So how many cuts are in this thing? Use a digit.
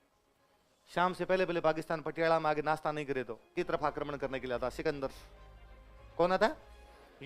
1